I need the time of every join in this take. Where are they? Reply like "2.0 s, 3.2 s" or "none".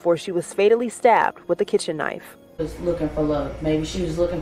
2.6 s